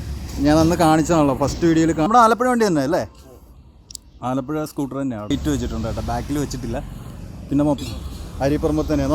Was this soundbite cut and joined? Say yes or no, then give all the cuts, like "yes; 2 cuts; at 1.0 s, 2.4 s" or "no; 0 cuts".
yes; 3 cuts; at 2.1 s, 5.3 s, 7.8 s